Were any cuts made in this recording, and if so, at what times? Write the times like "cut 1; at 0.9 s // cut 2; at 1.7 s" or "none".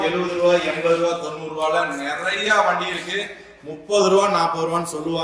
none